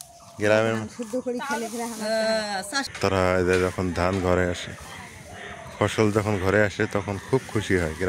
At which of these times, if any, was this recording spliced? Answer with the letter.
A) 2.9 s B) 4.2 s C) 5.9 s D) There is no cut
A